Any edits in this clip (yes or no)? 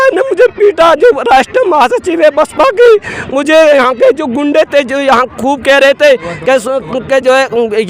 no